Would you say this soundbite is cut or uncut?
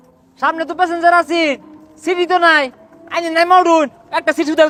uncut